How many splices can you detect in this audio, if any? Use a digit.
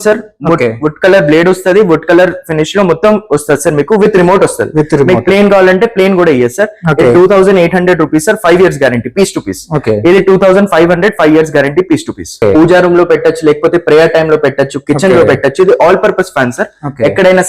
1